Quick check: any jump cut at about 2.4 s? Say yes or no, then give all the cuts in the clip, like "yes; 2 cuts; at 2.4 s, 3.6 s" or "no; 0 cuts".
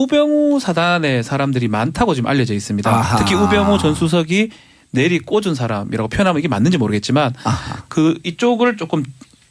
yes; 1 cut; at 2.4 s